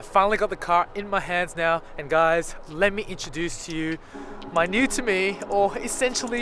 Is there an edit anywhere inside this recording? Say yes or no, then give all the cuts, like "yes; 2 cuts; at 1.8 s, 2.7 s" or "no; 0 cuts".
yes; 1 cut; at 1.9 s